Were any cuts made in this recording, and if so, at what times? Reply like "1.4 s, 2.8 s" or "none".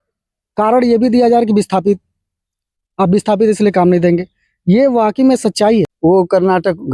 5.9 s